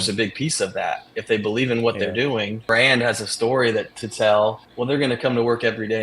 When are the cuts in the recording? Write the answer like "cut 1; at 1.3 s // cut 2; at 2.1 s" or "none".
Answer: cut 1; at 2.6 s // cut 2; at 4.7 s